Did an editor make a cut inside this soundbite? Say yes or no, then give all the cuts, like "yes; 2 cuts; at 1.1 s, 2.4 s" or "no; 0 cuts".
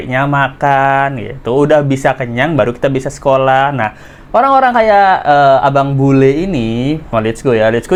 no; 0 cuts